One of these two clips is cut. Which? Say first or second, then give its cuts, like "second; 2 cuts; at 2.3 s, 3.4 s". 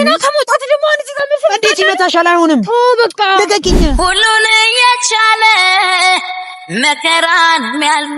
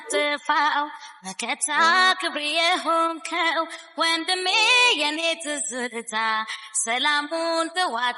first; 1 cut; at 3.9 s